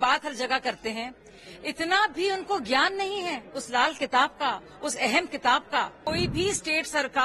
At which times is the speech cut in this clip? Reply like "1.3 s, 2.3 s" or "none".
6.0 s